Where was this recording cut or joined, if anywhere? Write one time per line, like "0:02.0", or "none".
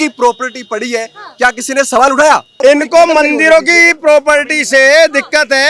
0:02.6